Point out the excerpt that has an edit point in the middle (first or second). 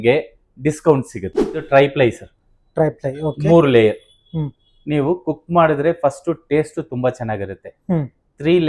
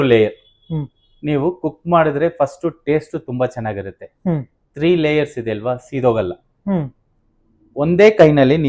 first